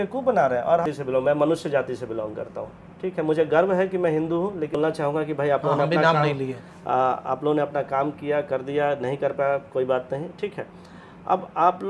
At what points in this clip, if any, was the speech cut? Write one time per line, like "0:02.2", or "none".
0:00.9
0:04.8

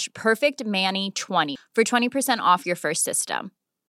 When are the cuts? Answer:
0:01.6

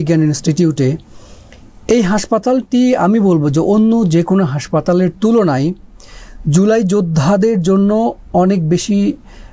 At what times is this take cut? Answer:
none

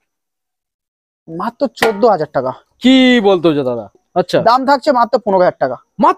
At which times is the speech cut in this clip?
0:03.9

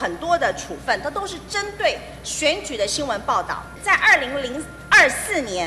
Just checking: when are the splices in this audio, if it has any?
0:03.7

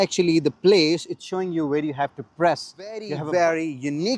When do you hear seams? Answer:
0:03.2

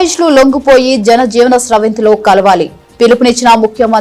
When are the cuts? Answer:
none

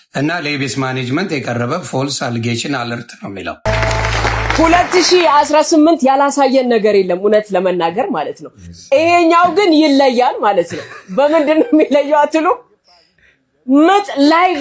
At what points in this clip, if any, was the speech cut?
0:03.6

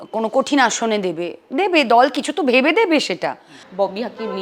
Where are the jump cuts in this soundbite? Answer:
0:03.5

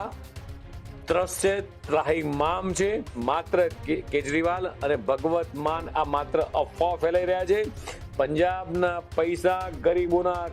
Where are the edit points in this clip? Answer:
0:03.2

